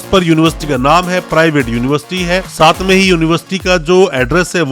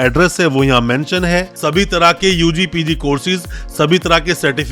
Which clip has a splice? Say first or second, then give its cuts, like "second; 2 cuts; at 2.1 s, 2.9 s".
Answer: second; 1 cut; at 1.5 s